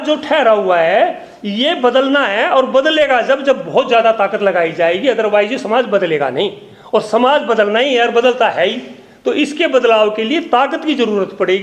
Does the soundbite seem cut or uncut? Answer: uncut